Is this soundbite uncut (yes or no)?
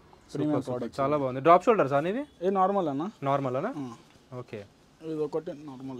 yes